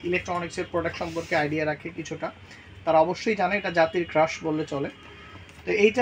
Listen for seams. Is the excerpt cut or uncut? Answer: uncut